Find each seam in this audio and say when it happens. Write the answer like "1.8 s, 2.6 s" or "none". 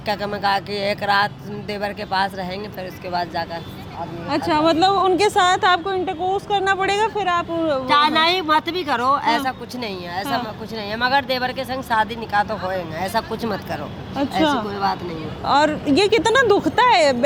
none